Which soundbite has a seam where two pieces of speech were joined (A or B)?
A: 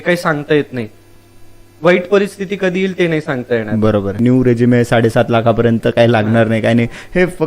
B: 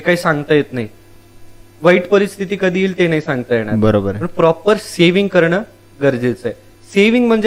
A